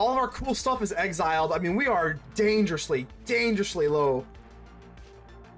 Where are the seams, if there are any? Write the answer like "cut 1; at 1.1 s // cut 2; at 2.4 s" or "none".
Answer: none